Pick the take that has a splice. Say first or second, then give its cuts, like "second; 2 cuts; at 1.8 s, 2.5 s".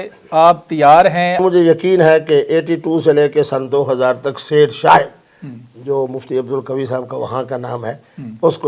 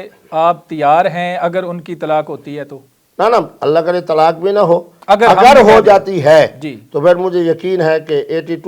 first; 1 cut; at 1.4 s